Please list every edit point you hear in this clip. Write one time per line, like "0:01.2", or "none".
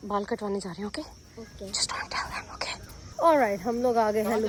none